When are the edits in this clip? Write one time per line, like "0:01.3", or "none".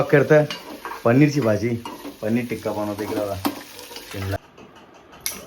0:04.4